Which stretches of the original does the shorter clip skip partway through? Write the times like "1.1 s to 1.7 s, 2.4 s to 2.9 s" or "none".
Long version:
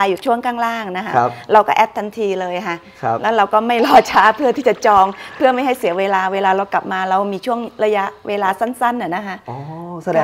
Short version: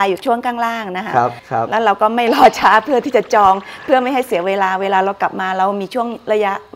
1.4 s to 2.9 s